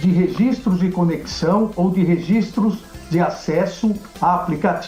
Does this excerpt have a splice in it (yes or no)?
no